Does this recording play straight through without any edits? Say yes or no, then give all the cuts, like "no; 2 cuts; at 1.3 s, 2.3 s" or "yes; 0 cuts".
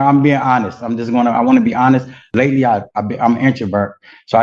no; 1 cut; at 2.2 s